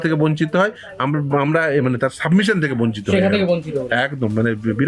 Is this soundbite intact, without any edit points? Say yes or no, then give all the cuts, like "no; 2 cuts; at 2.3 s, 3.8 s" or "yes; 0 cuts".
yes; 0 cuts